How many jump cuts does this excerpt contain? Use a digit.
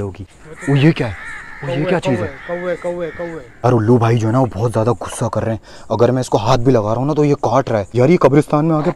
2